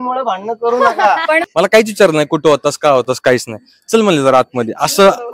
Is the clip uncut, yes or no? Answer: no